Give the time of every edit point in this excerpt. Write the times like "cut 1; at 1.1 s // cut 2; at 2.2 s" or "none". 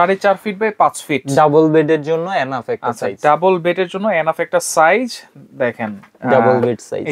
none